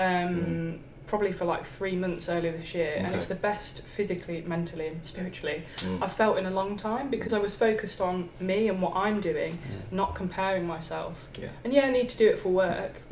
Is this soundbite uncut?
yes; 0 cuts

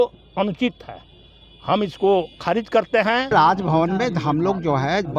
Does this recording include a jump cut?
yes; 1 cut; at 3.3 s

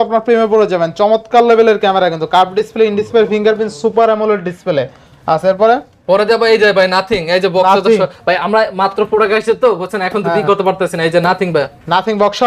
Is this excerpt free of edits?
yes; 0 cuts

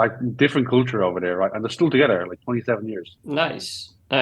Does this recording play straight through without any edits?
no; 1 cut; at 3.1 s

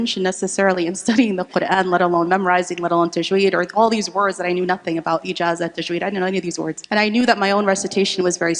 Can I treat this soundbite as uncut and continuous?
no; 1 cut; at 6.8 s

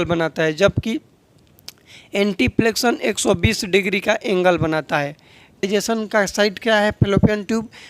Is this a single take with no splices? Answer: no; 1 cut; at 5.7 s

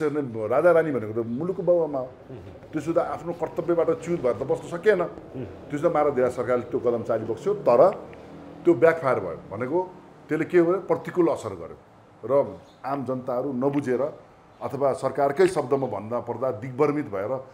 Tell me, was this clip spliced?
no; 0 cuts

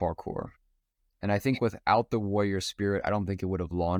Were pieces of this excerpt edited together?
no; 0 cuts

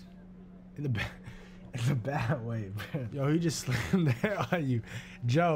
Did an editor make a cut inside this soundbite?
yes; 1 cut; at 3.0 s

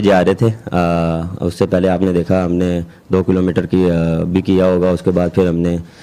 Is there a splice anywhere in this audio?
no; 0 cuts

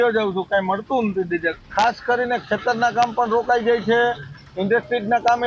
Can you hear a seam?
yes; 1 cut; at 1.6 s

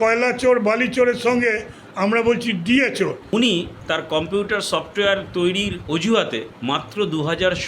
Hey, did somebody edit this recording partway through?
yes; 3 cuts; at 3.2 s, 3.8 s, 6.5 s

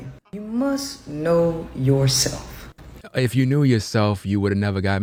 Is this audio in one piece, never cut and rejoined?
yes; 0 cuts

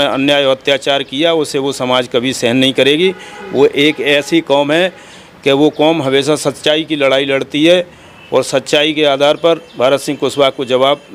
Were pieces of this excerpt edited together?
no; 0 cuts

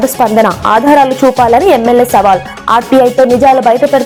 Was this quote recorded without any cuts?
yes; 0 cuts

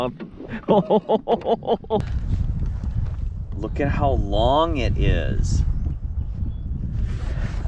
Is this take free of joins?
no; 1 cut; at 2.0 s

